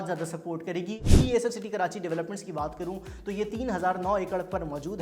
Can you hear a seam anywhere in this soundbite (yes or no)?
yes